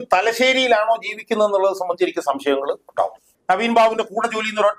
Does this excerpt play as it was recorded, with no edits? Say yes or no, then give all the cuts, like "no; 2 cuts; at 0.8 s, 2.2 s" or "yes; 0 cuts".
no; 1 cut; at 3.3 s